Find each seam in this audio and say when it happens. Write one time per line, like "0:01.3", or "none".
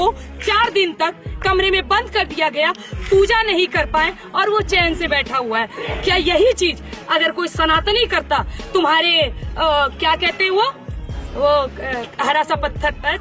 none